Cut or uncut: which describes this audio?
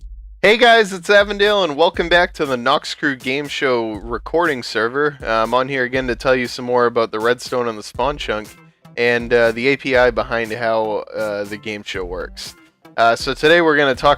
cut